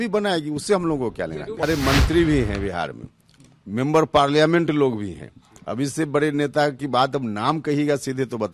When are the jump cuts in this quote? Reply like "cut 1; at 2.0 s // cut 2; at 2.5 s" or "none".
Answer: cut 1; at 1.6 s